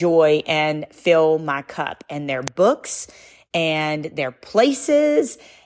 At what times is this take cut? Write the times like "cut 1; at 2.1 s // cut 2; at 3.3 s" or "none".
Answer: none